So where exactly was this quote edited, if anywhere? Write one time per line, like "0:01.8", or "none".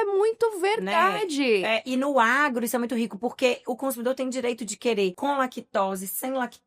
0:05.2